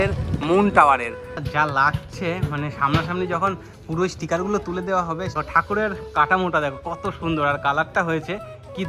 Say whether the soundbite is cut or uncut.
cut